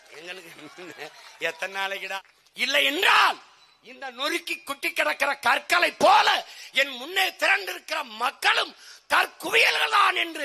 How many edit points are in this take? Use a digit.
1